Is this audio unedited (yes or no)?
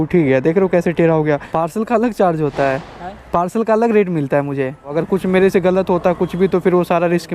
no